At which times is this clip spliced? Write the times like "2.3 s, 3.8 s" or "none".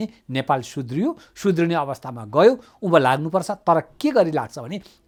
none